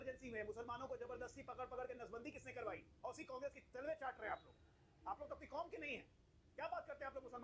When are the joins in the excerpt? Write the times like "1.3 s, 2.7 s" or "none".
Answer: 5.2 s